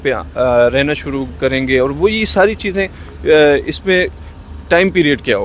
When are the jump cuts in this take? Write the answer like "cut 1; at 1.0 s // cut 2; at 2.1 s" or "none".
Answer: none

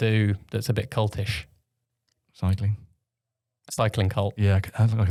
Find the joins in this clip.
none

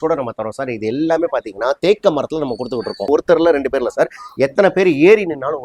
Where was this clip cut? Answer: cut 1; at 3.1 s

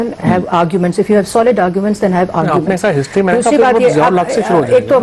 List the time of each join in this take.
none

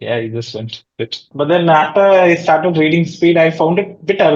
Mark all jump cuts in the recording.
cut 1; at 1.2 s

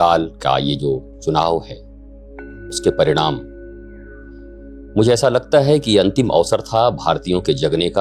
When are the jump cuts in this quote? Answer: none

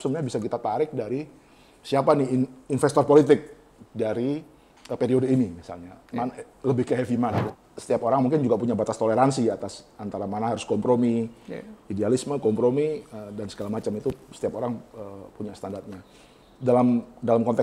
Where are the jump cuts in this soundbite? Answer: cut 1; at 7.4 s

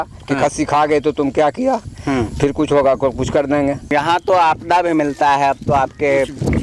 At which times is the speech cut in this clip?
cut 1; at 3.9 s

